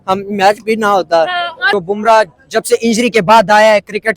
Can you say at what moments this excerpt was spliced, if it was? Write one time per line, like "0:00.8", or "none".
0:01.7